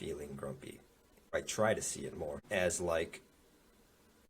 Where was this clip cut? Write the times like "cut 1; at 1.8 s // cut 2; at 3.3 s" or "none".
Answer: cut 1; at 1.3 s // cut 2; at 2.4 s